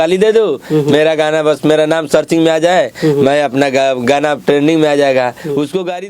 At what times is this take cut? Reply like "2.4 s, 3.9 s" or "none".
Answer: none